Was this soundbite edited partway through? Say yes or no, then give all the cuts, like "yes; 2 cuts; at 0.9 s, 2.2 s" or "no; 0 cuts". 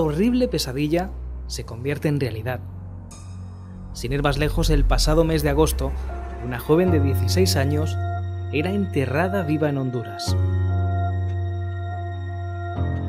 no; 0 cuts